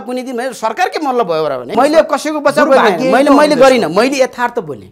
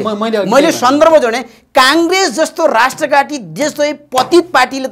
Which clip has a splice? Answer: first; 1 cut; at 1.7 s

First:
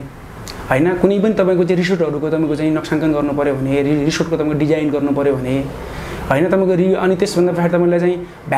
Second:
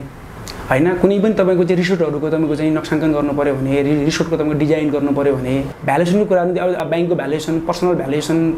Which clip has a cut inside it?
second; 2 cuts; at 5.7 s, 6.8 s

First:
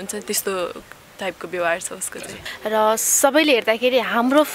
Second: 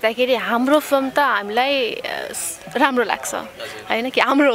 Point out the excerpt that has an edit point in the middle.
first; 1 cut; at 2.5 s

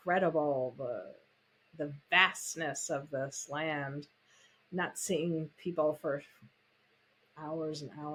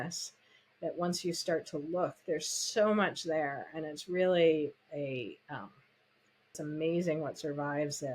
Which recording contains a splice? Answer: second; 1 cut; at 6.6 s

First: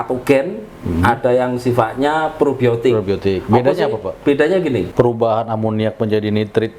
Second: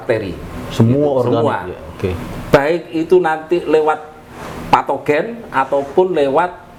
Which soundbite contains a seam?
first; 1 cut; at 4.9 s

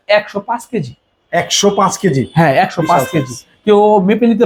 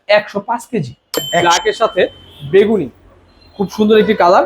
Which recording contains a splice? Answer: second; 1 cut; at 1.4 s

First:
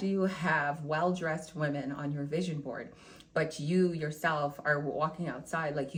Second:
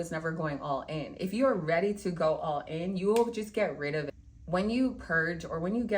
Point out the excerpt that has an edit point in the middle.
second; 1 cut; at 4.1 s

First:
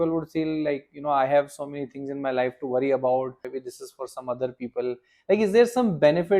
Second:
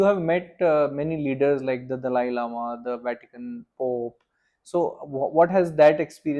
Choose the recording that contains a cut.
first; 1 cut; at 3.5 s

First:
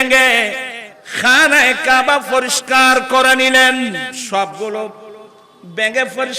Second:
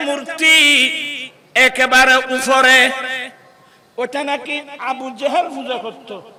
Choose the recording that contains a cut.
first; 1 cut; at 4.2 s

